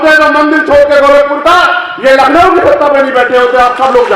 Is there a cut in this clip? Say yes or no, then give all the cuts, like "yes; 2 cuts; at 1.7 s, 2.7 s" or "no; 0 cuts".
no; 0 cuts